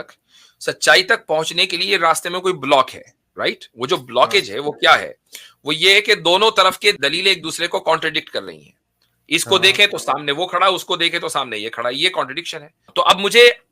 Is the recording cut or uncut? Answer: cut